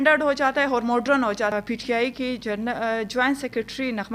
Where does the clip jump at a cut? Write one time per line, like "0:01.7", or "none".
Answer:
0:01.5